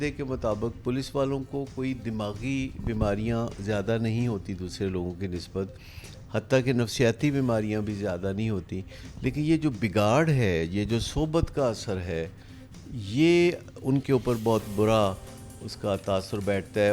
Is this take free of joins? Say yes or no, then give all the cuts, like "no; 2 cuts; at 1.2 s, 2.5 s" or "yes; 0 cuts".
yes; 0 cuts